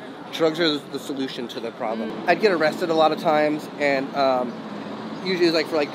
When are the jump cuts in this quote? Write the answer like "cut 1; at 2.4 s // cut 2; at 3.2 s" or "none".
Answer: cut 1; at 2.1 s